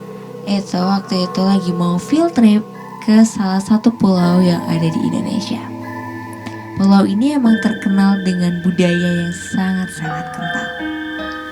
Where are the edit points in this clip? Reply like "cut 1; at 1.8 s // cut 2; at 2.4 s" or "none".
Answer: none